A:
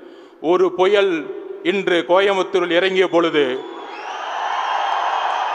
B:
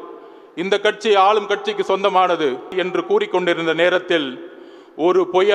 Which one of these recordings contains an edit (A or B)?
B